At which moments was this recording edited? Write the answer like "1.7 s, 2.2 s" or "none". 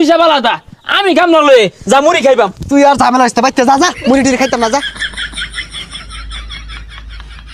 none